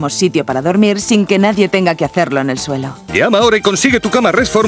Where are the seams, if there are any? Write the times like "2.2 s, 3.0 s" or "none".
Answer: 2.8 s